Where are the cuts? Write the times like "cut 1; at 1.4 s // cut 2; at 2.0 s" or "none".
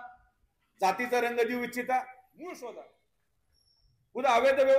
cut 1; at 2.3 s